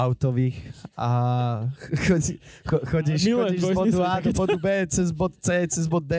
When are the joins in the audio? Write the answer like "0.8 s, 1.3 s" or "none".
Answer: none

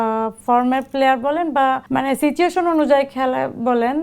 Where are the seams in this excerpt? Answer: 1.8 s

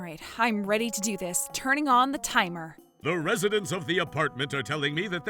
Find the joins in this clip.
2.9 s

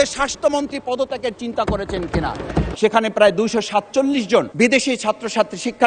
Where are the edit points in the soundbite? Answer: 2.7 s

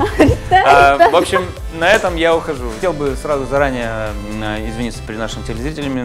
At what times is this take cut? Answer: 2.6 s

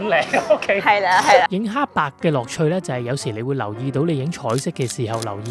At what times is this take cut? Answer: 1.5 s

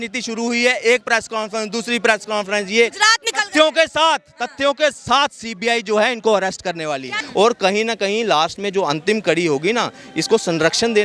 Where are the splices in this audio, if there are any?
7.2 s

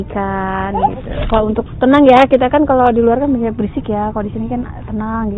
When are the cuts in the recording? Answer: 1.2 s

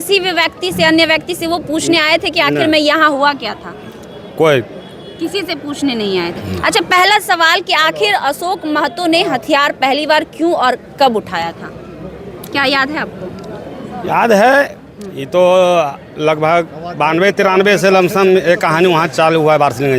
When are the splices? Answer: none

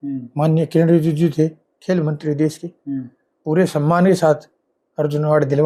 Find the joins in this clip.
none

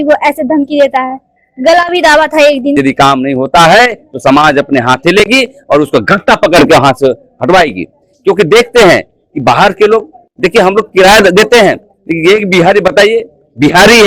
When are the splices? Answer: 2.8 s

